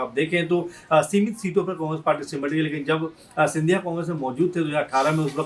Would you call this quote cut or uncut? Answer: uncut